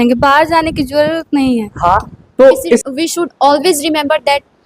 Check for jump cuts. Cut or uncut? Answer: cut